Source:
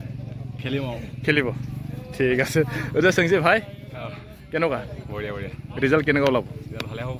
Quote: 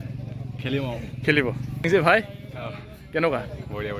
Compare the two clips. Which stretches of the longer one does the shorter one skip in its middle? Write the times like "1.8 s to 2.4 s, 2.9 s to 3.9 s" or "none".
1.9 s to 3.3 s